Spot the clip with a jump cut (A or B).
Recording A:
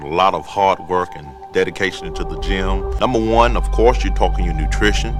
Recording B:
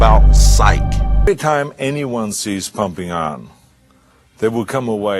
B